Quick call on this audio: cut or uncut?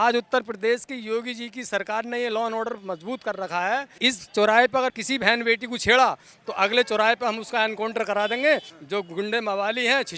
cut